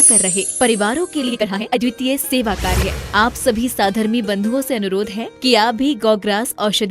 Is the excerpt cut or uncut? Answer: cut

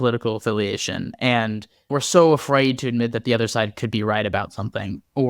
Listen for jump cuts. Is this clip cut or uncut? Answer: cut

